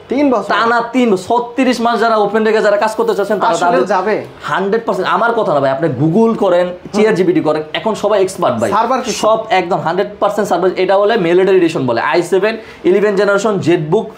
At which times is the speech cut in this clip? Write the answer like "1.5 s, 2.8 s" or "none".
none

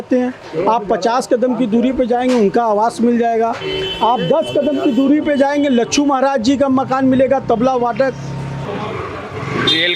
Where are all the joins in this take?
8.6 s

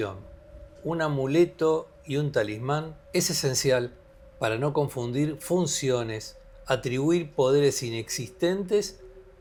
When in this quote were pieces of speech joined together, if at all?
none

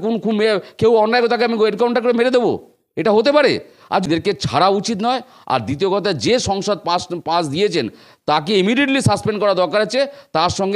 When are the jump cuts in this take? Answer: 4.1 s

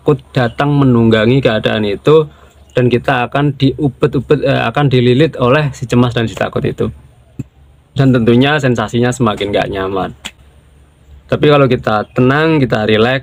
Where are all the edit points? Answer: none

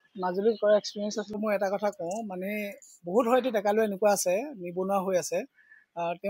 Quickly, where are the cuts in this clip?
1.4 s

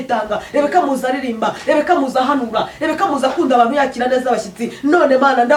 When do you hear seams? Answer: none

